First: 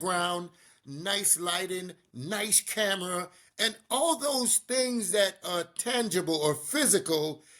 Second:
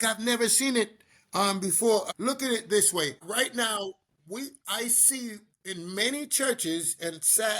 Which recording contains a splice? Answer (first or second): second